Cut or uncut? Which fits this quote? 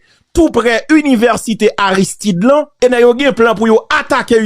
cut